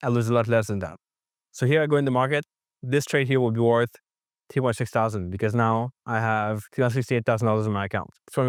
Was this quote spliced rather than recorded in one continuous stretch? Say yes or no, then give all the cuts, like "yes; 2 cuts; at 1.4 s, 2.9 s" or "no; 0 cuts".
no; 0 cuts